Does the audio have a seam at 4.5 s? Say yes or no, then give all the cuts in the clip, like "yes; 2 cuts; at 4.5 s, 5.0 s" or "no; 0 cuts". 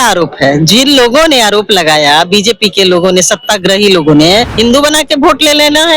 yes; 1 cut; at 4.5 s